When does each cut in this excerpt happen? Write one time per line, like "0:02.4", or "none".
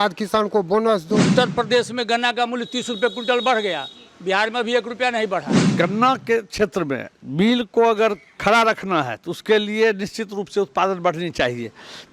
0:01.3
0:05.6